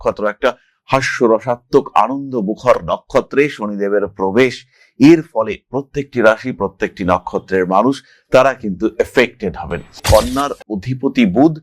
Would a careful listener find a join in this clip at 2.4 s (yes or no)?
no